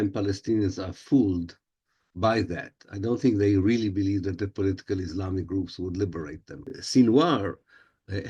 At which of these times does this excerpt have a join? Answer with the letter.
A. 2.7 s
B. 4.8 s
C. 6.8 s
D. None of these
C